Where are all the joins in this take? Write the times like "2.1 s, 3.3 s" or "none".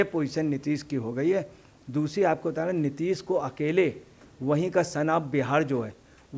1.7 s